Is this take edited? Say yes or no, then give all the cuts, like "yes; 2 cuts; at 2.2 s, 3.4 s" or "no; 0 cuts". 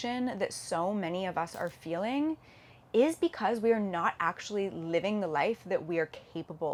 no; 0 cuts